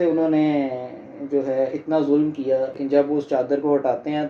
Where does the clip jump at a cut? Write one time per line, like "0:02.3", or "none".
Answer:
0:02.8